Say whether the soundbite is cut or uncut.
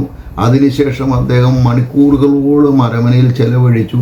uncut